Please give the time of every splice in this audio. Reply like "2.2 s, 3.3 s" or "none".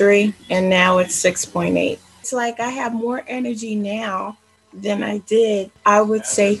2.3 s, 5.7 s